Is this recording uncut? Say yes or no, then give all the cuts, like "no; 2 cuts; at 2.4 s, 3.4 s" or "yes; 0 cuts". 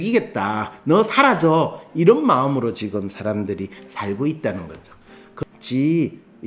no; 1 cut; at 5.3 s